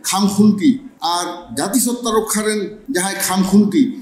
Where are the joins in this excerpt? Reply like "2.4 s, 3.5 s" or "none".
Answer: 0.9 s, 2.8 s